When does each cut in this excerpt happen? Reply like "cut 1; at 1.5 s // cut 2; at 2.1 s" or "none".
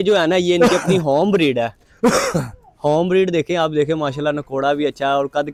none